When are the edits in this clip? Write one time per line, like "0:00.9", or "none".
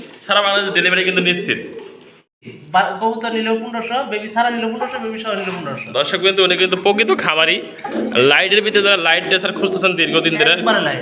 0:02.4